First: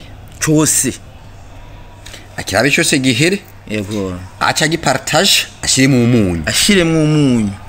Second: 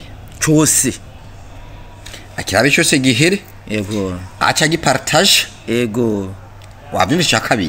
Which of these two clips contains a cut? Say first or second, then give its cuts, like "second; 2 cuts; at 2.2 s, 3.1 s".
first; 1 cut; at 5.5 s